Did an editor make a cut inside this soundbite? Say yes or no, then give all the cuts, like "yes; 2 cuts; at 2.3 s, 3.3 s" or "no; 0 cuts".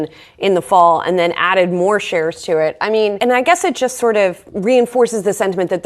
yes; 2 cuts; at 3.2 s, 4.5 s